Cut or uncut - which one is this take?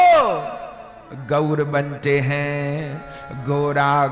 uncut